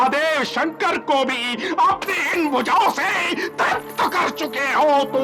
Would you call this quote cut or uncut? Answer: uncut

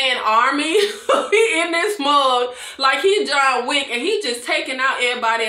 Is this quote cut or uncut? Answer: uncut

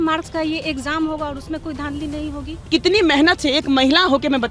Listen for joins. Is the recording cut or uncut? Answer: cut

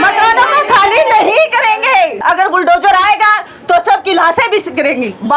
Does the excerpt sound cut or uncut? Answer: cut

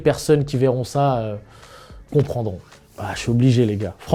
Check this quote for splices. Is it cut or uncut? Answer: uncut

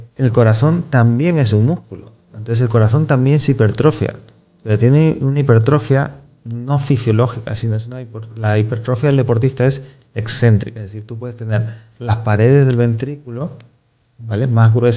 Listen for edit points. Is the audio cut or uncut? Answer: uncut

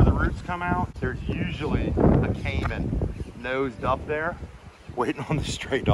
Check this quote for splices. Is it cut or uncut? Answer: cut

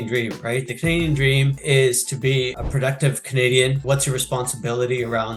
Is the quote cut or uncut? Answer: cut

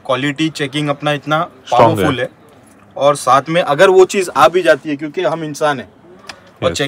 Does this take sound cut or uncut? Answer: uncut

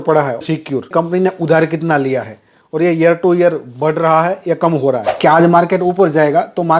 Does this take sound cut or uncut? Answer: cut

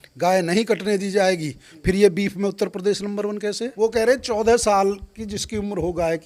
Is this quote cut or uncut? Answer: cut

